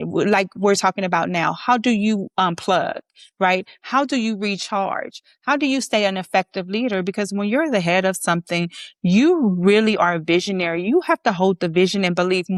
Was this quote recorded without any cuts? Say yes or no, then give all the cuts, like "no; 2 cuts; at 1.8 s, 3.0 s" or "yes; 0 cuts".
yes; 0 cuts